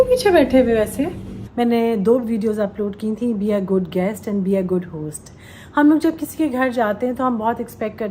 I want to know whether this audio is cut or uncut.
cut